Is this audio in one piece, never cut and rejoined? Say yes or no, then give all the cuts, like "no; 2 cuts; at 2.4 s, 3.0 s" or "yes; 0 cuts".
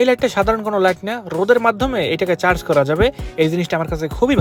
yes; 0 cuts